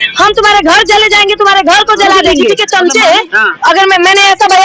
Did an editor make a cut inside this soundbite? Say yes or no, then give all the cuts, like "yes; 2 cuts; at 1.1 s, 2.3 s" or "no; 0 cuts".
yes; 1 cut; at 2.3 s